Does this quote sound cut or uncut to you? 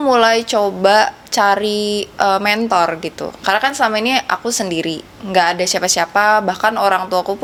uncut